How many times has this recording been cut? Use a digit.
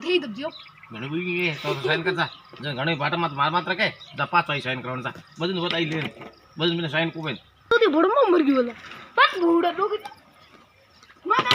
1